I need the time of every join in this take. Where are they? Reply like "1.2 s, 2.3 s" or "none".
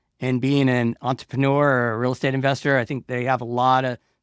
none

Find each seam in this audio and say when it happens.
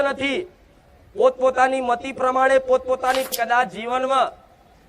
3.4 s

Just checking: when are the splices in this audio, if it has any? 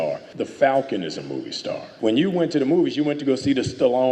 1.9 s

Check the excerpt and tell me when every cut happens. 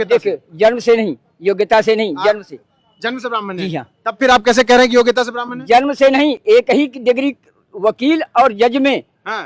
none

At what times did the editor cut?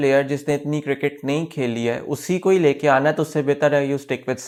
none

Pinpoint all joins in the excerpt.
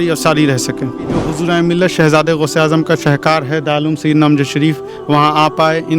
1.2 s

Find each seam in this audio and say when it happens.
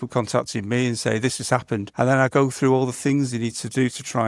1.9 s

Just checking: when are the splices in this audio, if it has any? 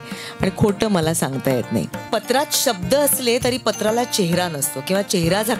2.0 s

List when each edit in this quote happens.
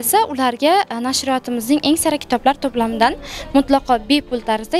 none

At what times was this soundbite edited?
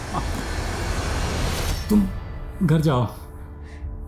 1.7 s

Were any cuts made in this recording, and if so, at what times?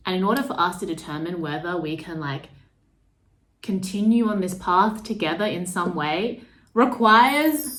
none

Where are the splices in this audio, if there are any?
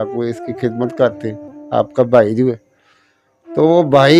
none

